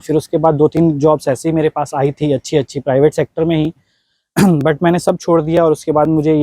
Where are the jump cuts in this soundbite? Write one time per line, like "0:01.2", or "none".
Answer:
none